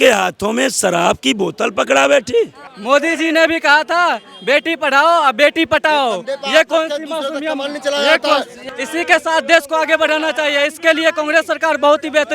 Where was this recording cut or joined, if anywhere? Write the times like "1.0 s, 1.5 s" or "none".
2.7 s